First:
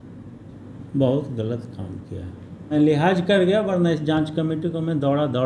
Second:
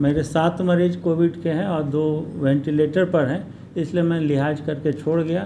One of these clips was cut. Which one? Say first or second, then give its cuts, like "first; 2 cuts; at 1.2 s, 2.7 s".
first; 1 cut; at 2.7 s